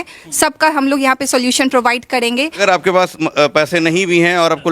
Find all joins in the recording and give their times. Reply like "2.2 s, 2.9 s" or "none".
2.6 s